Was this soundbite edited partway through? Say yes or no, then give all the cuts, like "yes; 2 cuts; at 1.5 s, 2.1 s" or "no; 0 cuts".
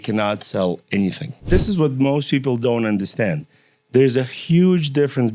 yes; 1 cut; at 1.5 s